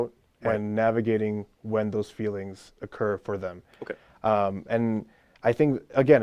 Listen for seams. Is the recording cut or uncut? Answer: uncut